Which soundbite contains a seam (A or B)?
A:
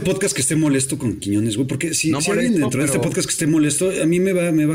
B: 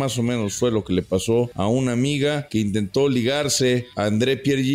B